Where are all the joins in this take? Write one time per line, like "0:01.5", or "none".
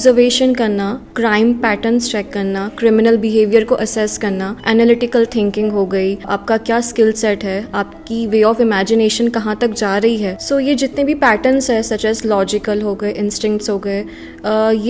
0:01.0
0:04.5
0:06.3
0:10.4